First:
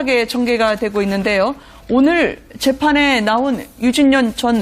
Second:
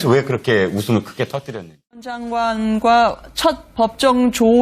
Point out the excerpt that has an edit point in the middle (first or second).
first